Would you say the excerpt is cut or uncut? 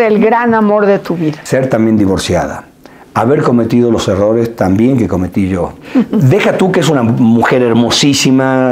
cut